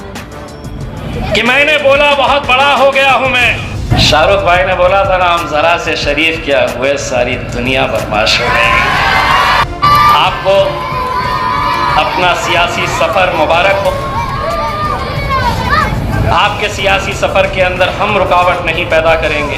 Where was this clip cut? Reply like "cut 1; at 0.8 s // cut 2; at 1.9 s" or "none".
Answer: cut 1; at 3.9 s // cut 2; at 9.7 s